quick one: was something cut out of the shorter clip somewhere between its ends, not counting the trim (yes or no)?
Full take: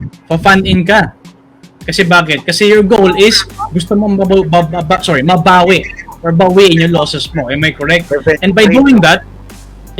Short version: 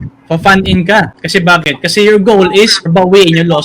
yes